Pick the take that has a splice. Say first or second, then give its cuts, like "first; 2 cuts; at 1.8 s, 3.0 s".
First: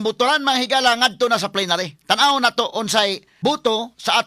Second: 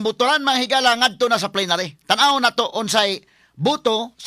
first; 1 cut; at 3.3 s